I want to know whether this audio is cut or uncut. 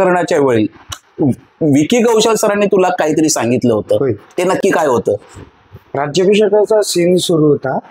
uncut